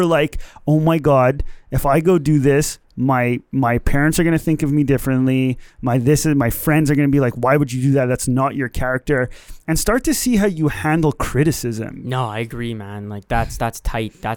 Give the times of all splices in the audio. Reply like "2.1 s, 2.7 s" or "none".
11.9 s